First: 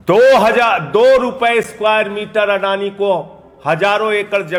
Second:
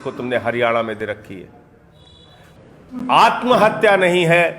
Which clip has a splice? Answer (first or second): second